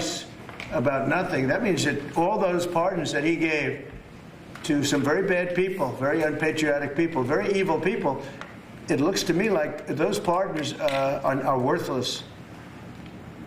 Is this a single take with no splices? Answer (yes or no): no